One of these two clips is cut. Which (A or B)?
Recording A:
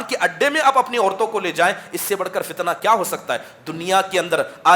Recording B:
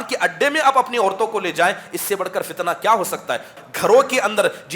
B